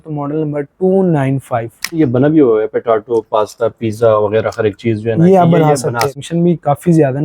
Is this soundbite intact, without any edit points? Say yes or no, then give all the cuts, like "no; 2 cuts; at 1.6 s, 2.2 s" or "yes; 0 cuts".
no; 2 cuts; at 2.0 s, 6.2 s